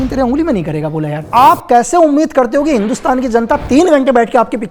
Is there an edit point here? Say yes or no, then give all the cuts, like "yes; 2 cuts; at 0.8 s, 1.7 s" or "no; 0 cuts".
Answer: yes; 1 cut; at 1.2 s